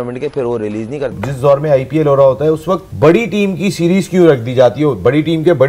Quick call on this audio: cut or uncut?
cut